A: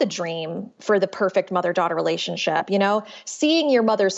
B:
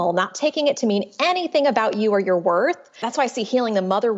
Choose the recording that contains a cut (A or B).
B